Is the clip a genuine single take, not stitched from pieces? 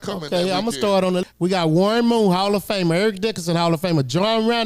yes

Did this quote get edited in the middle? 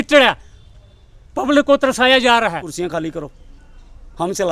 yes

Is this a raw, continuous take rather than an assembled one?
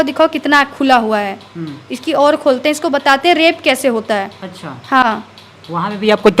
yes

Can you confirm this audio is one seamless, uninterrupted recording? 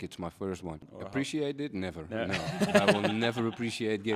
no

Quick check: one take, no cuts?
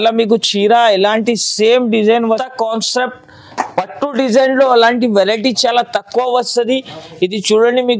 no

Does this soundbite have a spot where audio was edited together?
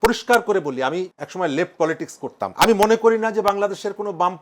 yes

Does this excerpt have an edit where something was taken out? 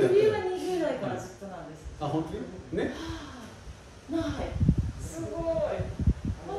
no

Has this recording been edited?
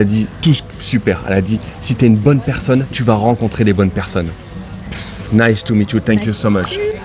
no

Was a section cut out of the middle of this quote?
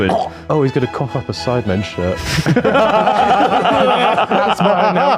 no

